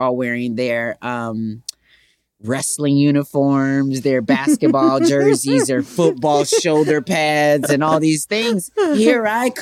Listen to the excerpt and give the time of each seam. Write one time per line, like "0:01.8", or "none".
none